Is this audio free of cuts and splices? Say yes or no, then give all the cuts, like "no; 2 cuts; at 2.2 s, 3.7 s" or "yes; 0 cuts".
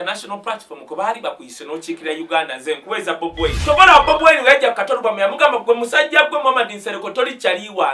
no; 1 cut; at 3.6 s